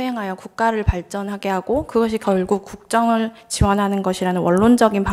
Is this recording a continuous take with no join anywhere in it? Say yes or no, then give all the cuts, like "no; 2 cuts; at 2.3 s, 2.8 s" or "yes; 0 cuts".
yes; 0 cuts